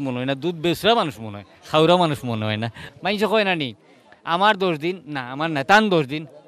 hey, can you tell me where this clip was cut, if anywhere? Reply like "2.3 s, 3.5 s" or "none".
2.8 s